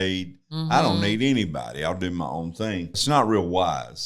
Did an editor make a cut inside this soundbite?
yes; 1 cut; at 2.9 s

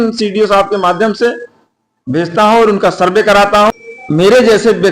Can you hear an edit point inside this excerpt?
yes; 1 cut; at 3.8 s

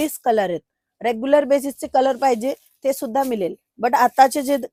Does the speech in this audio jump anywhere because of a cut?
no; 0 cuts

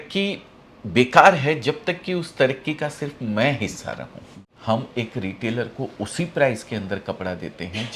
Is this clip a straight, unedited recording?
no; 1 cut; at 4.2 s

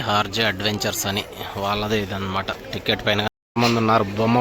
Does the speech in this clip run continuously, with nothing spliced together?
no; 1 cut; at 3.3 s

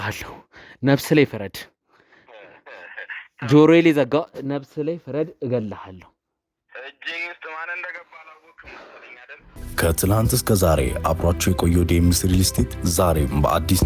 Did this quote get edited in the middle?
yes; 1 cut; at 9.4 s

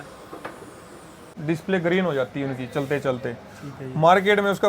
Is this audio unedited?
no; 1 cut; at 1.3 s

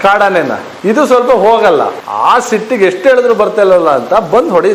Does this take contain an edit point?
no; 0 cuts

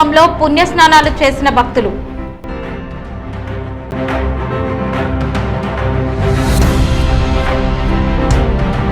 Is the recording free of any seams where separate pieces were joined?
no; 1 cut; at 3.8 s

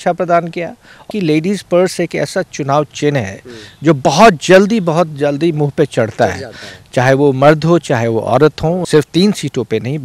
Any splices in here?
yes; 2 cuts; at 1.1 s, 8.8 s

